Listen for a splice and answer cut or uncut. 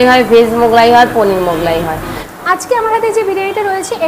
cut